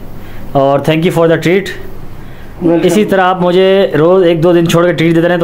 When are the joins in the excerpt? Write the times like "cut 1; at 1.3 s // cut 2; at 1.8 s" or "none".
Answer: none

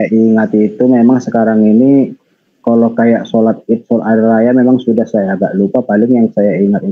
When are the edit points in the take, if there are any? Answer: none

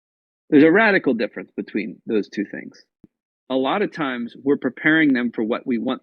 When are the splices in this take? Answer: cut 1; at 3.0 s

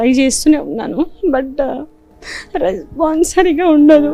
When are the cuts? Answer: none

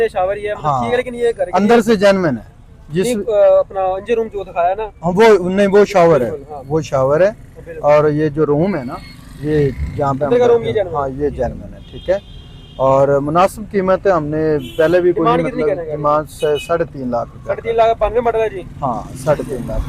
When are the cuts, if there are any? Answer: none

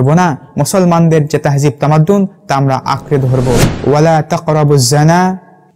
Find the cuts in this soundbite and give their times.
cut 1; at 3.7 s

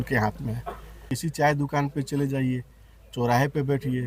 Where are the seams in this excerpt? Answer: cut 1; at 1.1 s

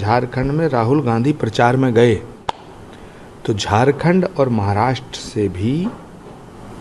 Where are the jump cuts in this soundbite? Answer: none

